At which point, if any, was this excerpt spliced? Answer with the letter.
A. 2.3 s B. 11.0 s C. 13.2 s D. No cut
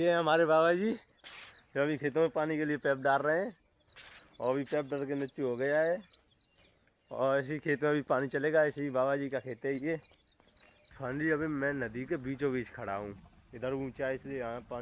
B